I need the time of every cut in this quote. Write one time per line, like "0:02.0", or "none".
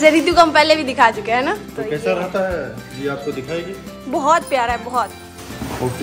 0:01.7